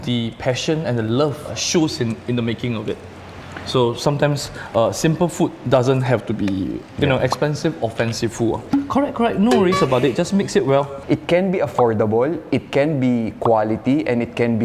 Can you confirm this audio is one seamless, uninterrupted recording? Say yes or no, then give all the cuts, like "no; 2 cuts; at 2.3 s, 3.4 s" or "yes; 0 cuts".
no; 1 cut; at 10.9 s